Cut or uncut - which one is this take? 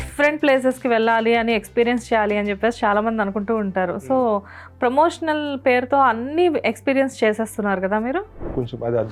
uncut